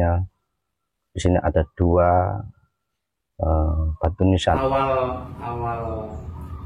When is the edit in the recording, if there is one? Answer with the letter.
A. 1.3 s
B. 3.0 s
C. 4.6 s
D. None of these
C